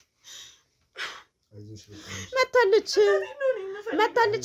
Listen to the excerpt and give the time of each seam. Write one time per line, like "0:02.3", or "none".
none